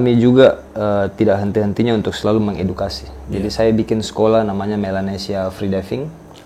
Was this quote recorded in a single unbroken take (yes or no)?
yes